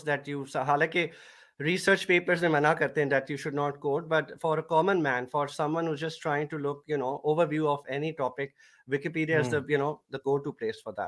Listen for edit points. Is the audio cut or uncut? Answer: uncut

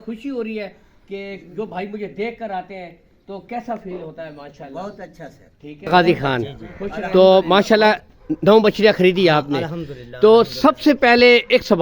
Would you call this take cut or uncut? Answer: cut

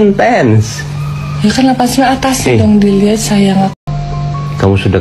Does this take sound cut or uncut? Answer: cut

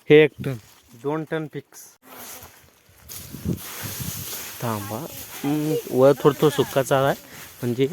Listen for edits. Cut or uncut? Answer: cut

